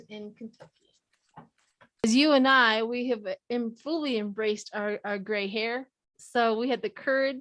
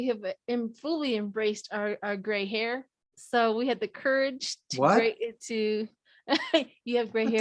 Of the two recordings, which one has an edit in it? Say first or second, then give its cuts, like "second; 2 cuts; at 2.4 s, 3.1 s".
first; 1 cut; at 2.0 s